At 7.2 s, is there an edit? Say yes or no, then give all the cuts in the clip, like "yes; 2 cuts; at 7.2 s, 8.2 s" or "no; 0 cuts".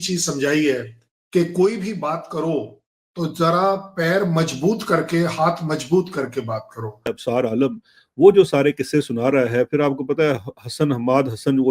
yes; 1 cut; at 7.2 s